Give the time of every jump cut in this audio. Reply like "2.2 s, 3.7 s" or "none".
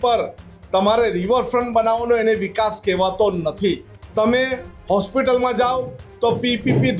3.9 s